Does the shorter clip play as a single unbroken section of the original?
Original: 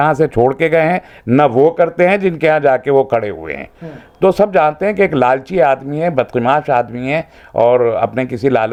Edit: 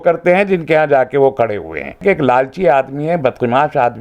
no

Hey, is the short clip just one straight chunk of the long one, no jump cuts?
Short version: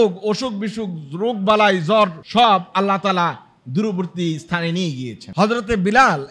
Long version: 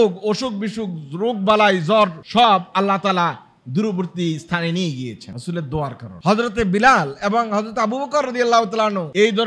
no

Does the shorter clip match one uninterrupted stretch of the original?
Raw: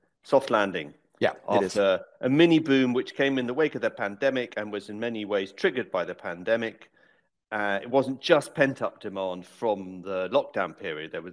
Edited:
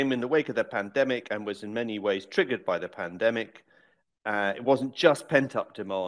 yes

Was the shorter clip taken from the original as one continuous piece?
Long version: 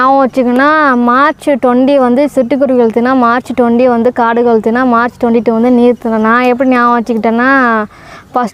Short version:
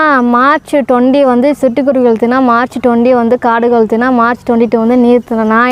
yes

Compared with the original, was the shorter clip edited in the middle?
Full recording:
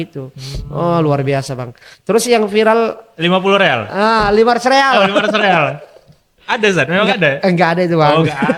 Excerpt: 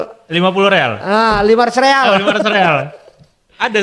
no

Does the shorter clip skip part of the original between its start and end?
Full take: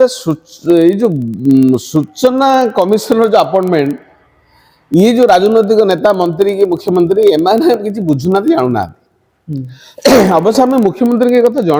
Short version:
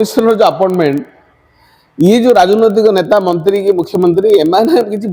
no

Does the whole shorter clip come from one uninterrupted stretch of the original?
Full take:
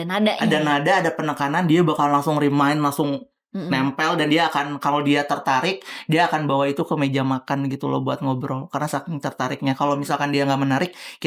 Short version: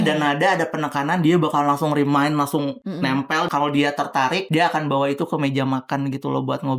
no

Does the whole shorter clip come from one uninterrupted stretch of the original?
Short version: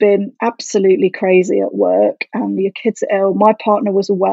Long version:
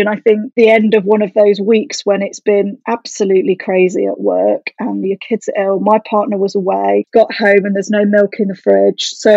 yes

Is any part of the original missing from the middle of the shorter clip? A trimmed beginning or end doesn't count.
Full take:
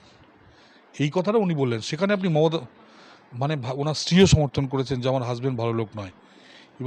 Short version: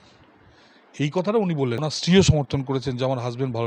yes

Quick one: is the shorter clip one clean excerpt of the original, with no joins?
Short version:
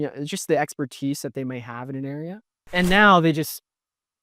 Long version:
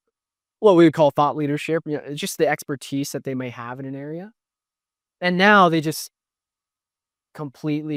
no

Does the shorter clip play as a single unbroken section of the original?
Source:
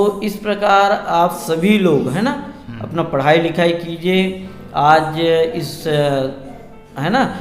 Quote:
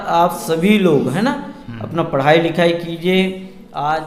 yes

